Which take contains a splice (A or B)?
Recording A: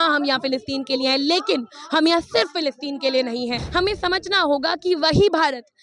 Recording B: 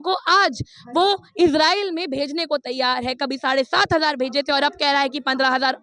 A